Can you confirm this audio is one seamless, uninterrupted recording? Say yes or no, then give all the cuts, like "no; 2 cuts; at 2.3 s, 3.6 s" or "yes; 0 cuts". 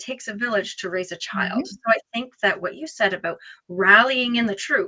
yes; 0 cuts